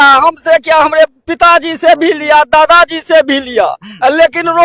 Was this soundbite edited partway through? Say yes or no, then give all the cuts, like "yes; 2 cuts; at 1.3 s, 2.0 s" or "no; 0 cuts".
no; 0 cuts